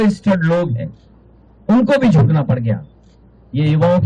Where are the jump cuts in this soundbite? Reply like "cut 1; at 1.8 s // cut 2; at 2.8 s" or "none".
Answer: none

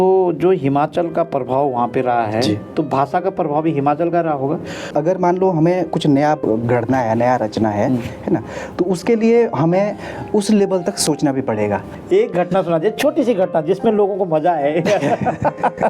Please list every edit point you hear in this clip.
cut 1; at 4.9 s // cut 2; at 11.9 s

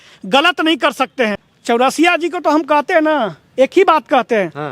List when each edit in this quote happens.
cut 1; at 1.5 s

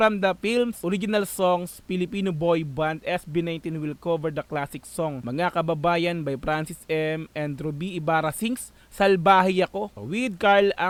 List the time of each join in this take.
none

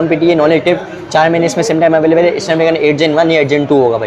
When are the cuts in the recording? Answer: none

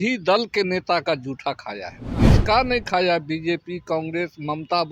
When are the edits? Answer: cut 1; at 2.1 s

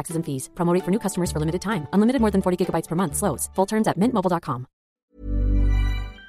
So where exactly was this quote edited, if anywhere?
cut 1; at 5.0 s

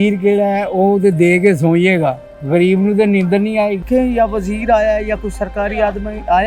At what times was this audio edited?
cut 1; at 3.8 s

